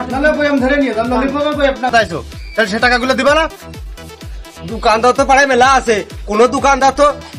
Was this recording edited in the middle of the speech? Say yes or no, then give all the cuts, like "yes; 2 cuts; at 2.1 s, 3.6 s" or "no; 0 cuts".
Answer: yes; 1 cut; at 1.9 s